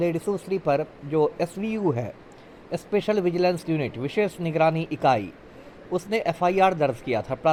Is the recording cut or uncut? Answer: uncut